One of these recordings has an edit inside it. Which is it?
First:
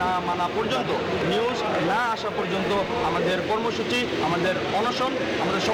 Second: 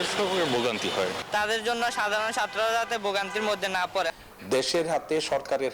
second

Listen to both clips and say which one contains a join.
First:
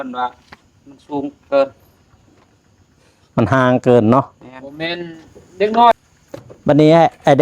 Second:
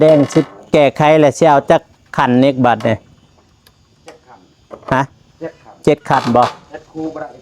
first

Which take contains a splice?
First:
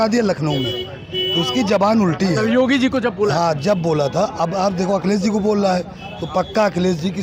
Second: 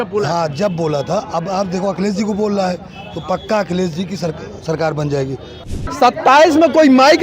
second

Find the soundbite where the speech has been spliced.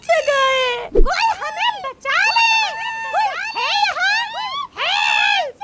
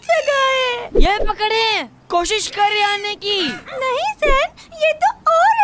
second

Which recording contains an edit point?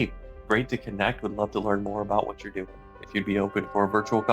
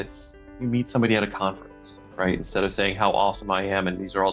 first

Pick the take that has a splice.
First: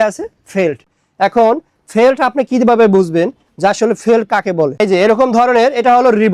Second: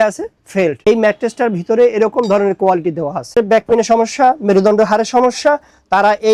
second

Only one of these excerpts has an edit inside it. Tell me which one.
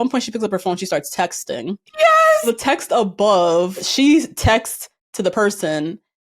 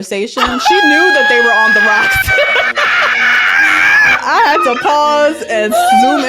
first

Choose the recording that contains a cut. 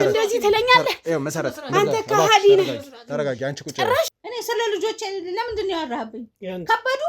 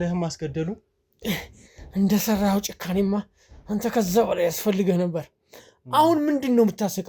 first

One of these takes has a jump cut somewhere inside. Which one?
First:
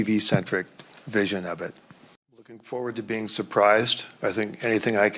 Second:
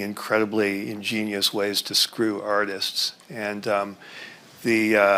first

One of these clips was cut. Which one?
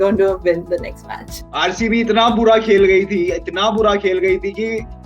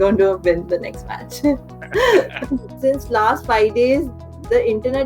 first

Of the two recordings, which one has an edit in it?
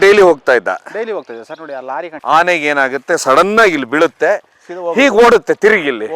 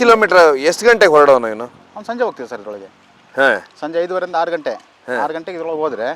first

